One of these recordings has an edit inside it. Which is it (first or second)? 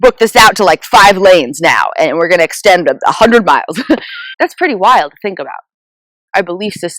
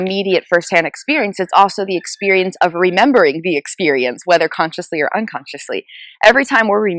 first